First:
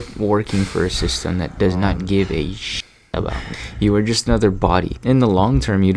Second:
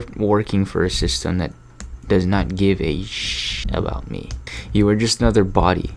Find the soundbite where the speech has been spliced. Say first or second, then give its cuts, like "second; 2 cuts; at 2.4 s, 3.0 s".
first; 3 cuts; at 1.5 s, 3.2 s, 4.9 s